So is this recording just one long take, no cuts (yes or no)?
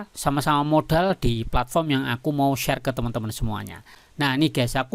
no